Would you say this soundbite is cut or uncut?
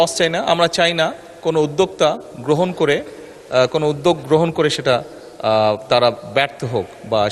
uncut